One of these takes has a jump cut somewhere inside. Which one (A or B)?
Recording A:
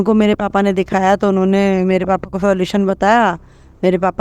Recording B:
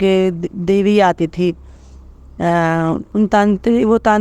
B